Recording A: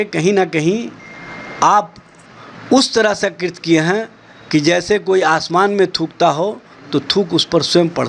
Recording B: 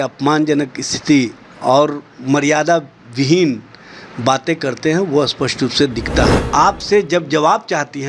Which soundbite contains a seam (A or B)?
B